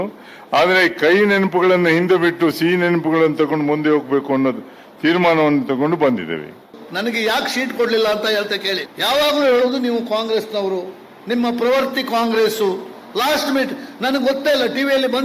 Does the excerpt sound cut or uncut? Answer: cut